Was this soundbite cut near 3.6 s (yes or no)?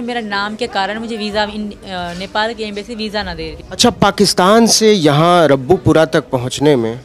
yes